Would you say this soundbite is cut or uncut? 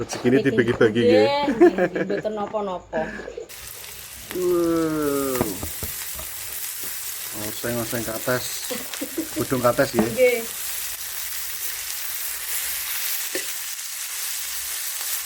cut